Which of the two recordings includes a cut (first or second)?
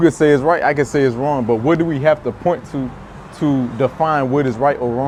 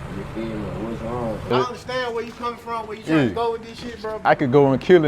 second